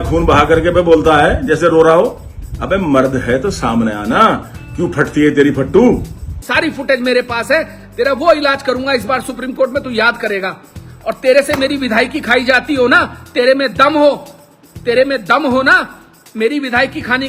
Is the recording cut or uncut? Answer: cut